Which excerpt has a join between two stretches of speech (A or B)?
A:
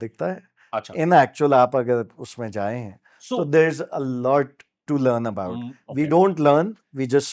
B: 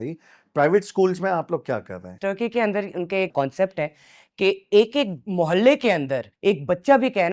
B